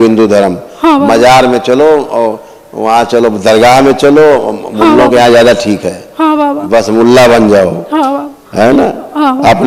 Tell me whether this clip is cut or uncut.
uncut